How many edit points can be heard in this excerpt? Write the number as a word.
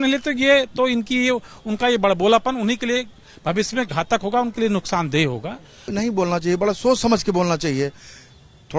one